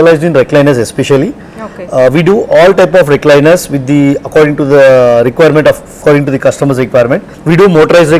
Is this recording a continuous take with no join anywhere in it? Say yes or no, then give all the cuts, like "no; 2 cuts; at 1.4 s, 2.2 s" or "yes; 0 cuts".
yes; 0 cuts